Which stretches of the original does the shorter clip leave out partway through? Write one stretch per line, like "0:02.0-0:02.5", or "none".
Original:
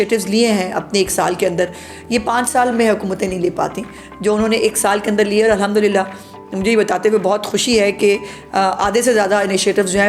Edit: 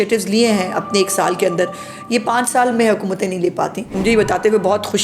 0:03.8-0:06.4